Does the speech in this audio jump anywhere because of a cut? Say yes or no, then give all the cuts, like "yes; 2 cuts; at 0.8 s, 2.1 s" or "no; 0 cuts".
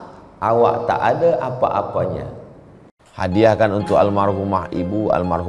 yes; 1 cut; at 3.0 s